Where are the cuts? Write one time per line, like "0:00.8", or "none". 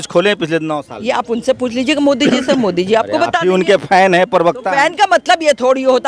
none